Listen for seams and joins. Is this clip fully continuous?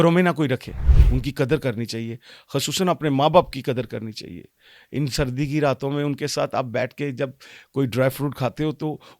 no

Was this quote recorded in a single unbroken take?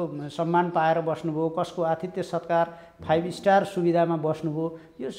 yes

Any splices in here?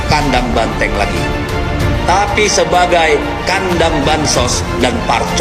no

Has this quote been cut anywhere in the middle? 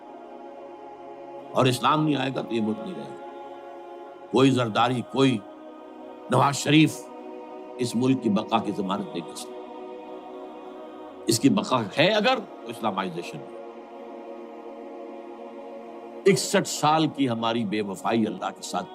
yes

